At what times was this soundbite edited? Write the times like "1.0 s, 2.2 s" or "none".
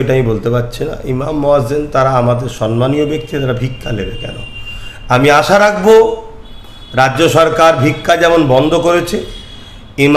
none